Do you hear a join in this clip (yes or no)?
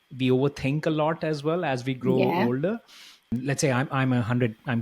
yes